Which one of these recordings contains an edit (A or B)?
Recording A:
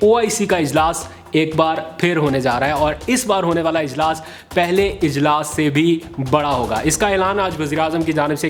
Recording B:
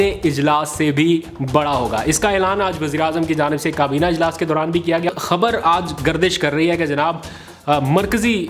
B